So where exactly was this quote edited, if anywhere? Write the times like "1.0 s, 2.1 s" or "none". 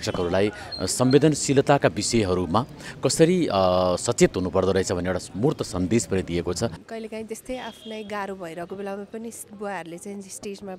6.8 s